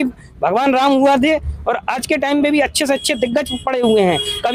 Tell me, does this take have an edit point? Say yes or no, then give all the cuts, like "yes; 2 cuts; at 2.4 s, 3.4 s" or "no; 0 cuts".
no; 0 cuts